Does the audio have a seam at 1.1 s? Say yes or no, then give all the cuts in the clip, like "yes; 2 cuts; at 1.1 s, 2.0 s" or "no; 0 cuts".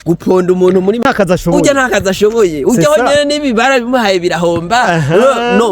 yes; 1 cut; at 1.1 s